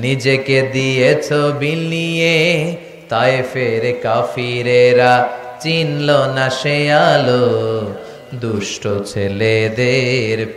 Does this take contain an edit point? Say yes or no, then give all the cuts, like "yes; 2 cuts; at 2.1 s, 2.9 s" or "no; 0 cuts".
no; 0 cuts